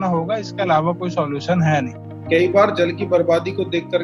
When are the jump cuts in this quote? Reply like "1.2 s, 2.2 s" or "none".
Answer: 2.1 s